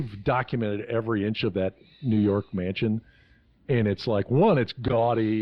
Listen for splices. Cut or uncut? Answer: uncut